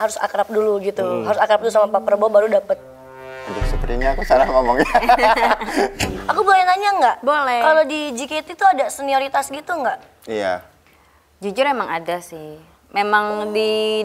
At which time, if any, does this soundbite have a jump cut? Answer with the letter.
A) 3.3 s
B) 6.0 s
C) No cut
B